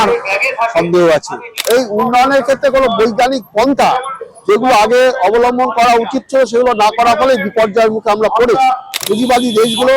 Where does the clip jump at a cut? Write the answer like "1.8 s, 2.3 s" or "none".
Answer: 1.6 s, 9.0 s